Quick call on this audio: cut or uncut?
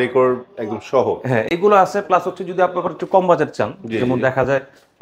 uncut